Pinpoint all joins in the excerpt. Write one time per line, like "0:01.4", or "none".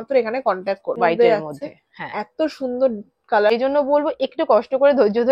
0:01.0
0:03.5